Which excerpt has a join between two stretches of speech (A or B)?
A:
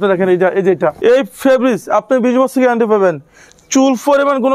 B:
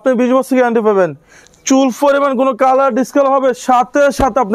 A